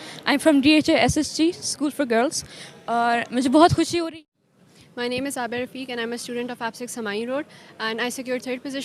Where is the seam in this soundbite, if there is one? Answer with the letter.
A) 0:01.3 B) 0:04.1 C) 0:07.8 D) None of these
B